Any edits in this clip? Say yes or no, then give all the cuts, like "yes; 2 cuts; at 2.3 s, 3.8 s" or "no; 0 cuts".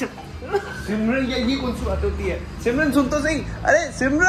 no; 0 cuts